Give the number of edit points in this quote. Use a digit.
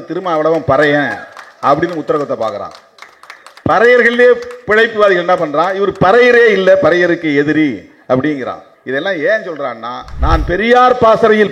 1